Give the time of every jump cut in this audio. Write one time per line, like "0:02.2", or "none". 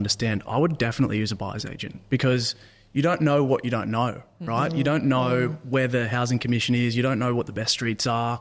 none